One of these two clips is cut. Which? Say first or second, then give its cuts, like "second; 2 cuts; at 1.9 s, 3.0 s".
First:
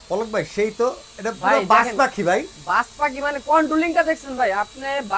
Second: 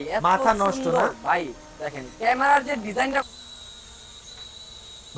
second; 1 cut; at 3.2 s